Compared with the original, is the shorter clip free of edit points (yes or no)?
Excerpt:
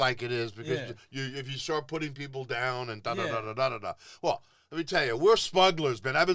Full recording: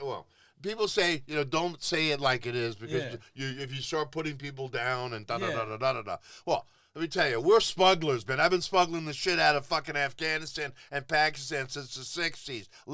yes